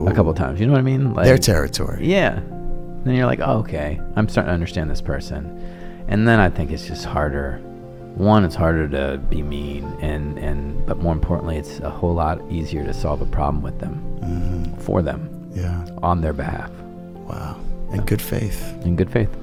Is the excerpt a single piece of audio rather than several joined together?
yes; 0 cuts

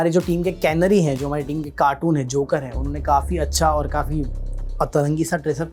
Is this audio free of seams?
yes; 0 cuts

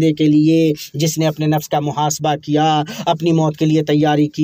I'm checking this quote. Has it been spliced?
no; 0 cuts

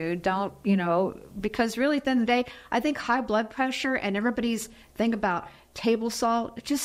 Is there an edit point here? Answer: no; 0 cuts

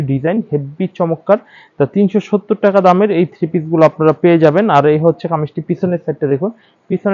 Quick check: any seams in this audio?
no; 0 cuts

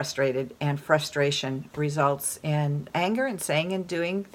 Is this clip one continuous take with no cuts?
no; 1 cut; at 2.9 s

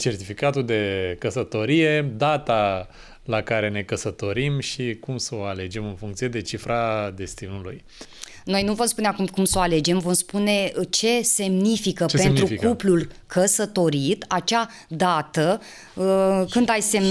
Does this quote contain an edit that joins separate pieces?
no; 0 cuts

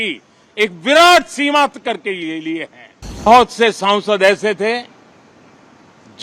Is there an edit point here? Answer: yes; 1 cut; at 3.3 s

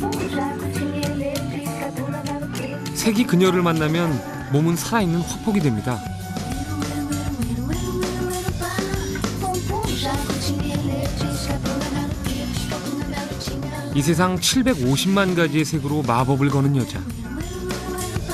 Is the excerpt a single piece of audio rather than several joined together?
yes; 0 cuts

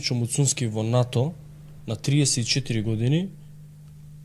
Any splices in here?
no; 0 cuts

